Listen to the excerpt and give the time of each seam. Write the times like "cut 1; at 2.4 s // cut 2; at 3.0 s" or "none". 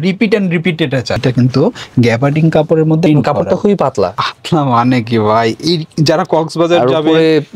cut 1; at 1.2 s